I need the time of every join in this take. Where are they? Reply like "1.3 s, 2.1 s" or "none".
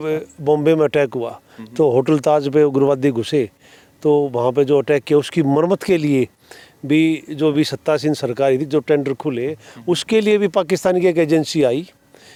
none